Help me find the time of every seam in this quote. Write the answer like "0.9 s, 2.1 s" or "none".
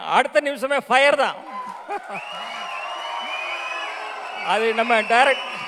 none